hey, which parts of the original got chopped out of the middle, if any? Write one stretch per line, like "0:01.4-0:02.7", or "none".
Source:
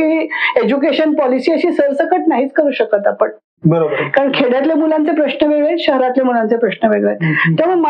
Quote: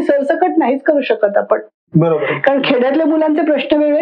none